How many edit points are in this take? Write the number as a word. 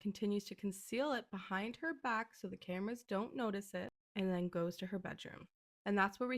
one